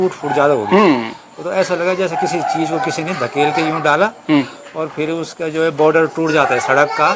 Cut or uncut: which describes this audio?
uncut